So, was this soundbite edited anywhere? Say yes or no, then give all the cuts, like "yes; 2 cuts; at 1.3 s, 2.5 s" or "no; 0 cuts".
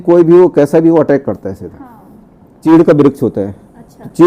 yes; 1 cut; at 2.6 s